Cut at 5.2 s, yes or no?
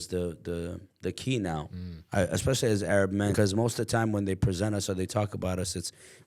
no